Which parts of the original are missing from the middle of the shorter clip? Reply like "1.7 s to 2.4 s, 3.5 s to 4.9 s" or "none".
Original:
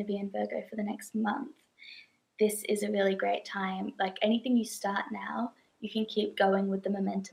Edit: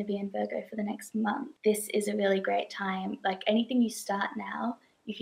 1.5 s to 2.2 s